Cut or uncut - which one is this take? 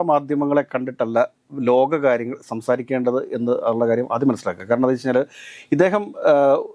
uncut